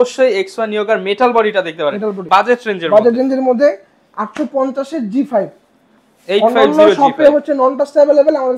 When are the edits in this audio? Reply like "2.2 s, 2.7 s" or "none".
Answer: 2.2 s